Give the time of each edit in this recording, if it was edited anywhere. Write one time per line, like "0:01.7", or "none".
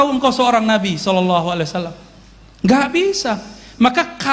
none